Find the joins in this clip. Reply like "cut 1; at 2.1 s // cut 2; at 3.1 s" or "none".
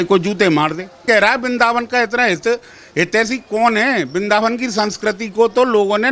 cut 1; at 1.0 s